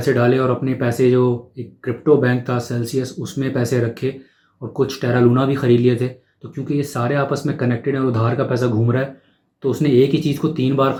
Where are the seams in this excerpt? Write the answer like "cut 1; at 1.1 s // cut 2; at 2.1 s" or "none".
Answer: none